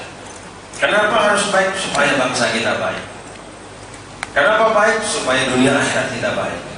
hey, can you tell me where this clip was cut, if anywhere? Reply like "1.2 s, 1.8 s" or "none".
none